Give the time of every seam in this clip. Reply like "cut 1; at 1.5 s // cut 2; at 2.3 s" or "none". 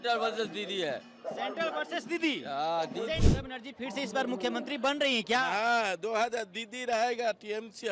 cut 1; at 3.2 s